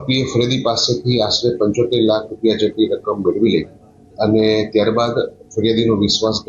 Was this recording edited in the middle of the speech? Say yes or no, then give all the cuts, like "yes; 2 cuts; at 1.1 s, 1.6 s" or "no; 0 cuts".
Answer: no; 0 cuts